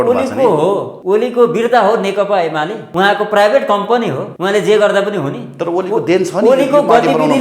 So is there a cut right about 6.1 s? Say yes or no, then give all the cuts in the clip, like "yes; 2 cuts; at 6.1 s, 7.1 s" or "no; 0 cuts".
no; 3 cuts; at 0.9 s, 2.8 s, 4.3 s